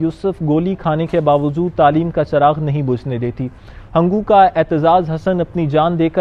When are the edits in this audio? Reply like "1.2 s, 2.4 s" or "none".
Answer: none